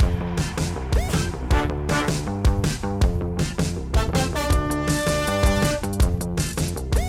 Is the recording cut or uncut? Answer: uncut